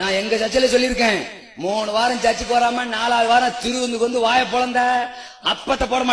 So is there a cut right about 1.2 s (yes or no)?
no